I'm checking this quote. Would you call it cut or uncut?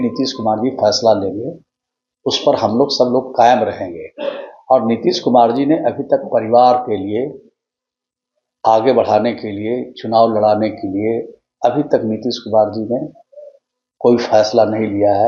uncut